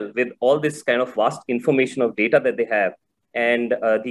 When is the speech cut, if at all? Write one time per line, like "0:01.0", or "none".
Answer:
none